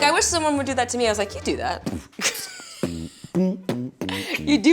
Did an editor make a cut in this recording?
no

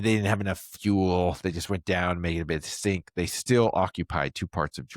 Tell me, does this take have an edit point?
no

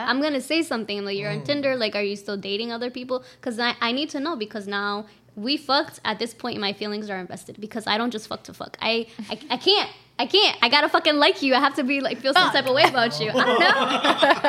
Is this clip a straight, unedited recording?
yes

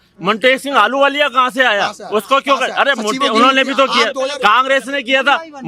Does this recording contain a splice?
no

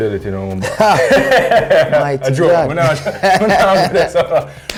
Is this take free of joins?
yes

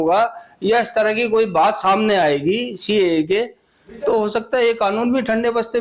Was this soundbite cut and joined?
no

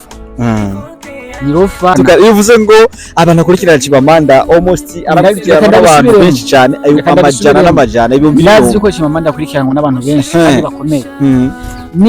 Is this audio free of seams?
no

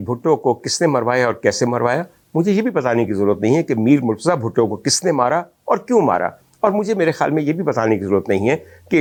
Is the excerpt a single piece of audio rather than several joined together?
yes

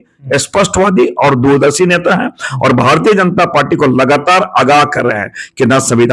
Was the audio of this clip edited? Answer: no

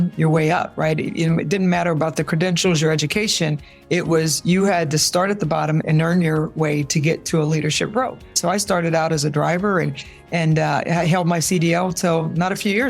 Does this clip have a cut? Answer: yes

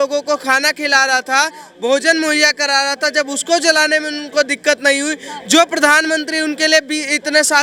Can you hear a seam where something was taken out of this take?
no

